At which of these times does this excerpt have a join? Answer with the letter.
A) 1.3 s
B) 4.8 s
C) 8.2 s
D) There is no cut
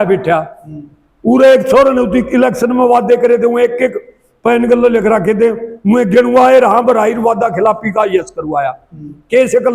D